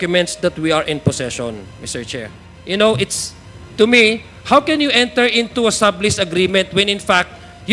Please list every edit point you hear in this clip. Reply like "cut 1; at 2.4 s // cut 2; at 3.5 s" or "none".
cut 1; at 2.3 s